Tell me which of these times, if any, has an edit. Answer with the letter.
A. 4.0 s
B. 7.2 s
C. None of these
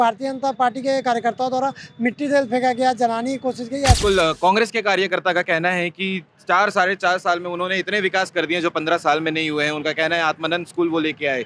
A